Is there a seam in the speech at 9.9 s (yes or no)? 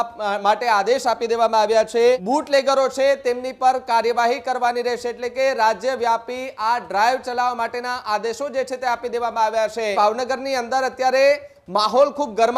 yes